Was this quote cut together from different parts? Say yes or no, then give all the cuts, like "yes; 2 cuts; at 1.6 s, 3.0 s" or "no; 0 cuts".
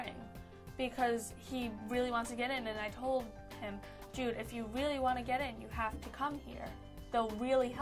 no; 0 cuts